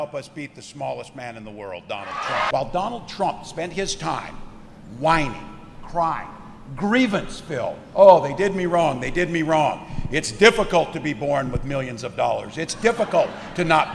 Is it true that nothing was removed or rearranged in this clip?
no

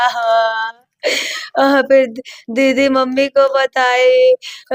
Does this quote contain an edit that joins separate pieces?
no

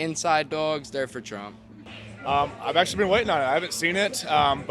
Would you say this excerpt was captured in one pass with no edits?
yes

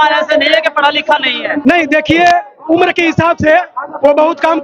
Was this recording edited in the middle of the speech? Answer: yes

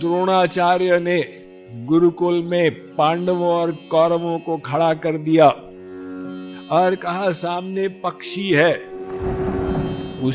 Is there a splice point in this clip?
no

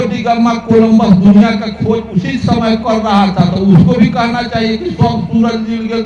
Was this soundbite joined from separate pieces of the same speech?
no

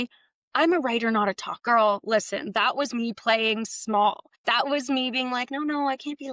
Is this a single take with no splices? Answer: no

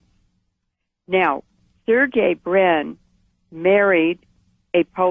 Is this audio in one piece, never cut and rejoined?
no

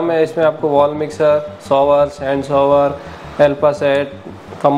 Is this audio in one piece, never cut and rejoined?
yes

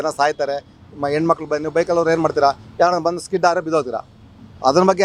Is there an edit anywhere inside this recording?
no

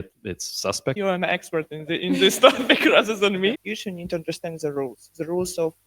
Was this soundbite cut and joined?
yes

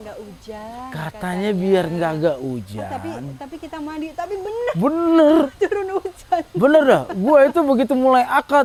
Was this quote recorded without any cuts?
yes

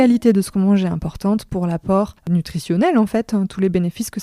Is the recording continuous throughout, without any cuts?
no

